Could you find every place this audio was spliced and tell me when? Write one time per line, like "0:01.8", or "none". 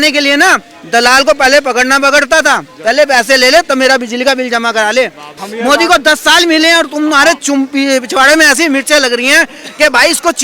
0:05.4